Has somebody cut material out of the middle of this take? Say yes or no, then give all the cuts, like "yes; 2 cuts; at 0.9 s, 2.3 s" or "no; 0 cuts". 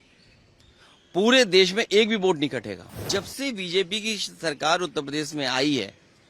yes; 1 cut; at 3.0 s